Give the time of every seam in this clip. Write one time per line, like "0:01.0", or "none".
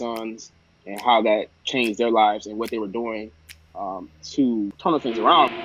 0:04.8

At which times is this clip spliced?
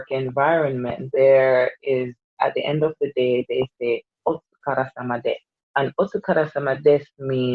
0:01.0
0:05.5

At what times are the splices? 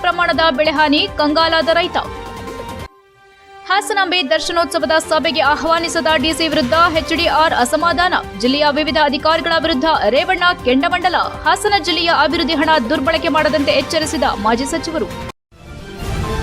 0:15.3

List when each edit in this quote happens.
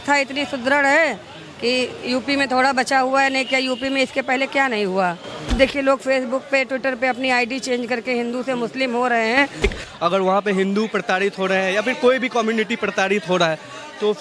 0:05.5
0:09.6

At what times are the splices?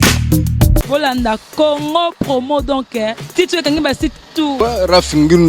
0:00.9
0:04.5

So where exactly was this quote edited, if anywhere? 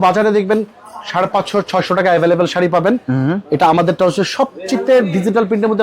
none

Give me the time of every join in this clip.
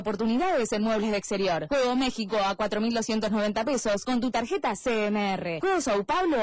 0:04.1

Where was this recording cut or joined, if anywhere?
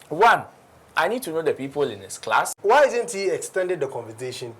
0:02.5

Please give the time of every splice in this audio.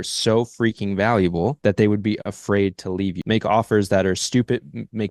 0:01.6
0:03.2

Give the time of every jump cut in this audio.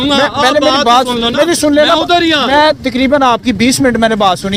none

